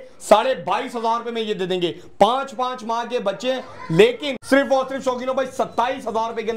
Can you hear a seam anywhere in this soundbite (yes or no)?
yes